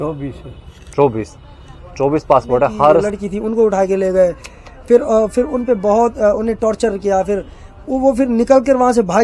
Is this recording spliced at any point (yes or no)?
yes